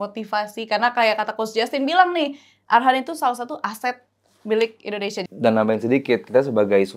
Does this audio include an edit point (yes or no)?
yes